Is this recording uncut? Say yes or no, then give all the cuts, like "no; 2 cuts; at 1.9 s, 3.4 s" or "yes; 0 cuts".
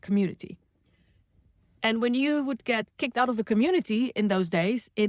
yes; 0 cuts